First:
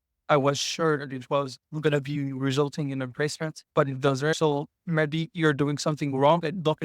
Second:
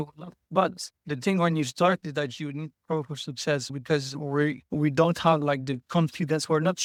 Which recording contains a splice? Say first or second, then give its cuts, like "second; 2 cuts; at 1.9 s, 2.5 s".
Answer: first; 1 cut; at 4.4 s